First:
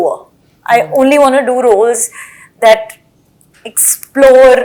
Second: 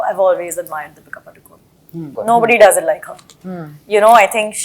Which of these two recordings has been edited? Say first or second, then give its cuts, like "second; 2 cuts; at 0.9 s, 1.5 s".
second; 1 cut; at 2.1 s